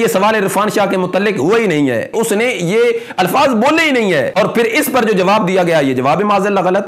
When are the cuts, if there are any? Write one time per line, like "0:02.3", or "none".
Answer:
0:02.1
0:04.3